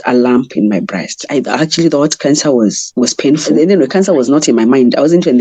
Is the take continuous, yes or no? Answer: no